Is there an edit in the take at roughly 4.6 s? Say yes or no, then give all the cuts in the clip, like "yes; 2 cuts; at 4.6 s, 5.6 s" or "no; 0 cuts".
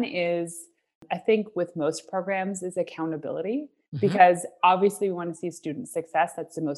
no; 1 cut; at 1.0 s